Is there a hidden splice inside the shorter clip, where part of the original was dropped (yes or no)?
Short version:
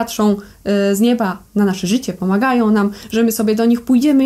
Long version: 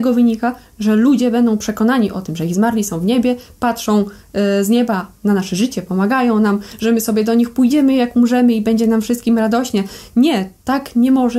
no